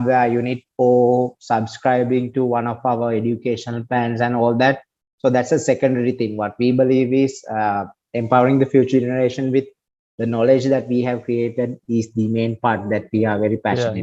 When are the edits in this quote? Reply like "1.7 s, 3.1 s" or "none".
none